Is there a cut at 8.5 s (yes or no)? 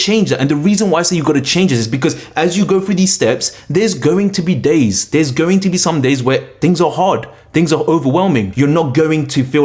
yes